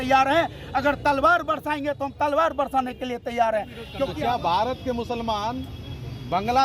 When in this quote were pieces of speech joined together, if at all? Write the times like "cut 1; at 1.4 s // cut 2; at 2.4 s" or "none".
cut 1; at 3.8 s